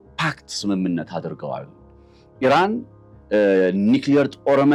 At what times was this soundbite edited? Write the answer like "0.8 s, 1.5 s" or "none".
none